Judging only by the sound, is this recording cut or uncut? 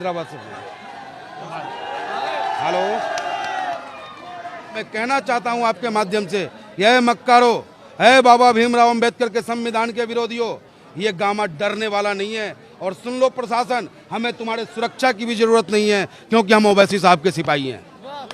cut